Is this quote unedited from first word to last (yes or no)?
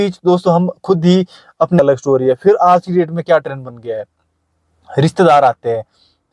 no